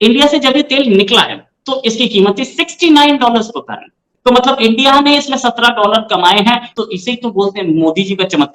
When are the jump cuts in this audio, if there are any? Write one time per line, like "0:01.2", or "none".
none